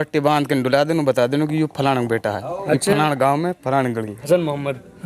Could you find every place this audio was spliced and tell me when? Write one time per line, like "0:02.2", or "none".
0:04.2